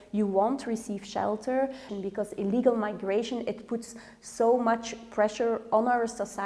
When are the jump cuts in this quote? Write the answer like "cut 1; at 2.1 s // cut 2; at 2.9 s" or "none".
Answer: cut 1; at 1.9 s